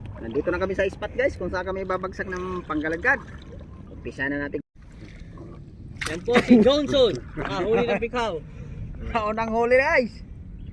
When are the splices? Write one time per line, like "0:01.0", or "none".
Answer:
0:04.6